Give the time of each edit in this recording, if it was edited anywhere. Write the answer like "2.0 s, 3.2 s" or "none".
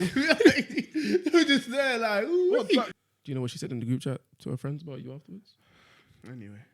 2.9 s